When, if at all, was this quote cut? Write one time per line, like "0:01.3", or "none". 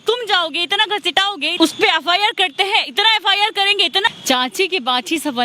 0:01.5
0:04.1